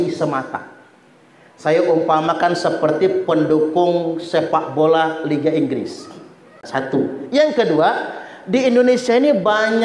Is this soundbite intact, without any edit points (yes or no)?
no